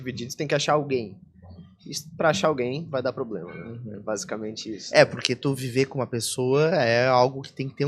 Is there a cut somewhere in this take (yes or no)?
no